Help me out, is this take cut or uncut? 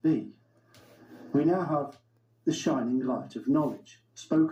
uncut